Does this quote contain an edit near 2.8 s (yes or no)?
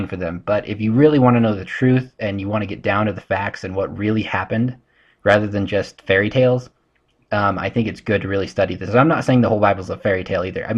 yes